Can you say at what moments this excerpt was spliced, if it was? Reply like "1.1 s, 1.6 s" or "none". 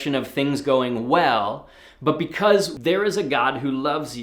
2.7 s